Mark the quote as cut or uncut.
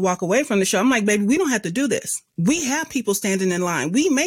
uncut